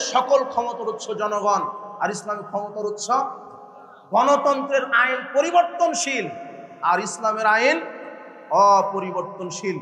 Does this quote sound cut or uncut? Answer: uncut